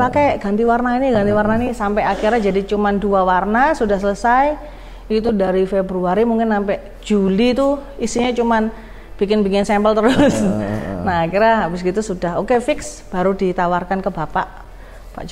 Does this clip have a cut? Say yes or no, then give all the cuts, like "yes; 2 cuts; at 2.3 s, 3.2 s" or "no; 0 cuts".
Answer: no; 0 cuts